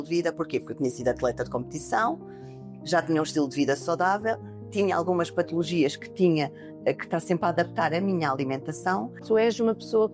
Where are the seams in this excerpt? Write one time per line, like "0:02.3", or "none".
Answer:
0:09.2